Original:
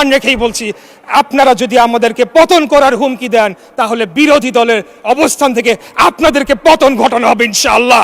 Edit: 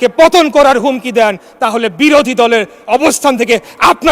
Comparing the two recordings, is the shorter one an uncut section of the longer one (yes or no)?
yes